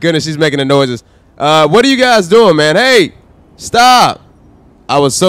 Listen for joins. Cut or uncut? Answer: uncut